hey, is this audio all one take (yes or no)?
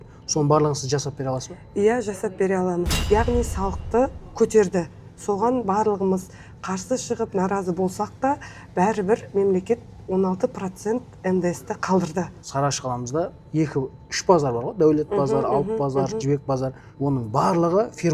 no